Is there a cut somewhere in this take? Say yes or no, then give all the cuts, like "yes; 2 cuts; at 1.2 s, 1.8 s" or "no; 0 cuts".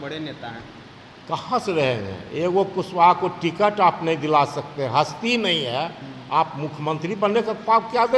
no; 0 cuts